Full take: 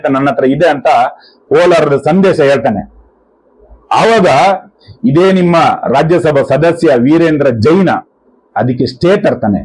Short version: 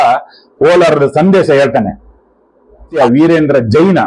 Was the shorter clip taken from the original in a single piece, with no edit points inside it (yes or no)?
no